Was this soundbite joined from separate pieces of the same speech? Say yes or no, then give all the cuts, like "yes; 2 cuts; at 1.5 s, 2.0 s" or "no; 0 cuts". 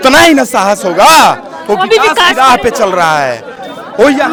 no; 0 cuts